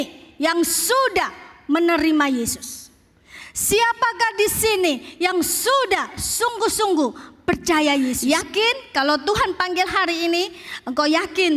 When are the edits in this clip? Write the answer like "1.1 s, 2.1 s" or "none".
8.2 s